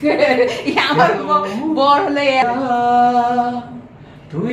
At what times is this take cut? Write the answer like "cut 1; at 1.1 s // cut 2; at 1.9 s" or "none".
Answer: cut 1; at 2.4 s